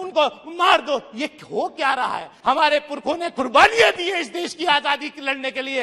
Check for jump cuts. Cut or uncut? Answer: cut